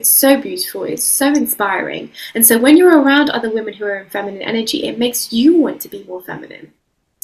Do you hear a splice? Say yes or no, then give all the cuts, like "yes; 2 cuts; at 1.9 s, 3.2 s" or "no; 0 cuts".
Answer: no; 0 cuts